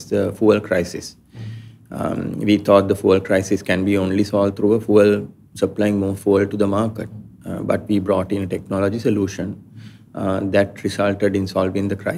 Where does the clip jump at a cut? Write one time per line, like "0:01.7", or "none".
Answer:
none